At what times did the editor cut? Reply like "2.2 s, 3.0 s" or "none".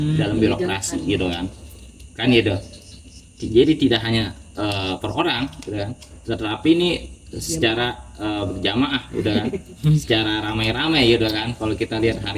none